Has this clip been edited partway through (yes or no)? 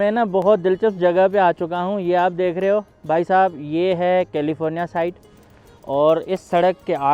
no